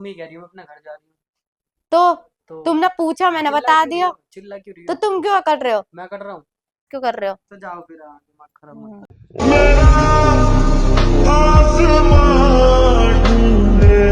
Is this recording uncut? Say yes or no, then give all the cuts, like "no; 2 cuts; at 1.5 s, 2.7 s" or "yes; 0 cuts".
no; 2 cuts; at 6.9 s, 9.1 s